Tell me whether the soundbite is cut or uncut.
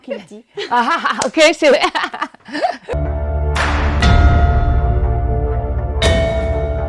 cut